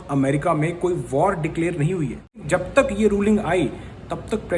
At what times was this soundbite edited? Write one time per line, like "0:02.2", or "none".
0:02.4